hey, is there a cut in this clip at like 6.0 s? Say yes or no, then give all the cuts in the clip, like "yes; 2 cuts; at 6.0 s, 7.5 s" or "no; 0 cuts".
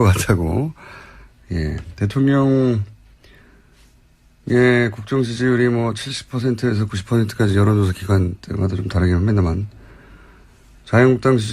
no; 1 cut; at 1.7 s